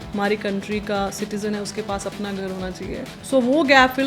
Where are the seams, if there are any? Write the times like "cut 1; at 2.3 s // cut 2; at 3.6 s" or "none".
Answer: cut 1; at 3.1 s